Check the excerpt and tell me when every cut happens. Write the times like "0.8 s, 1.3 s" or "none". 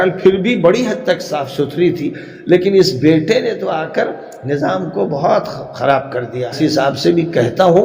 6.6 s